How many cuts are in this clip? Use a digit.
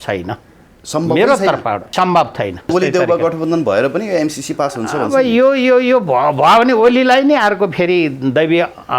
2